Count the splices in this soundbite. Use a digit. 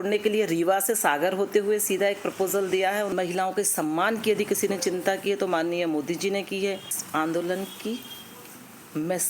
2